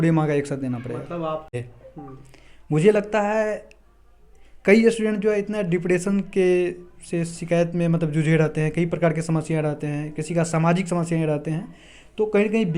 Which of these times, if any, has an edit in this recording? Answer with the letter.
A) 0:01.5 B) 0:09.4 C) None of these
A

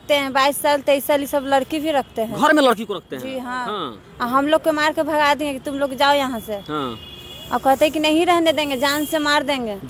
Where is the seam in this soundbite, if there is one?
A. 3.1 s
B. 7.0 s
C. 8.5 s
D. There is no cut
D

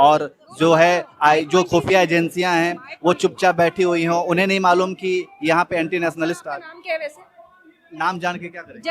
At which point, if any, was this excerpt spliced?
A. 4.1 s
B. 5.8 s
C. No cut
C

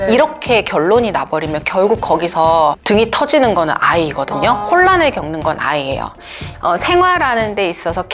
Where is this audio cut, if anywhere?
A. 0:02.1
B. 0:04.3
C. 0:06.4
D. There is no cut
C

